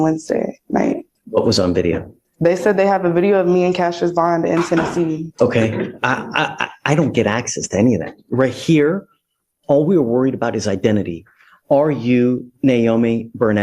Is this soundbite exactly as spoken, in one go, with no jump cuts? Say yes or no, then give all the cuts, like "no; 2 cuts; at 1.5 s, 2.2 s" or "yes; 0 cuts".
no; 2 cuts; at 1.1 s, 5.3 s